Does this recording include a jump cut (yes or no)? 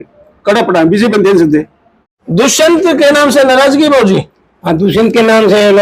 yes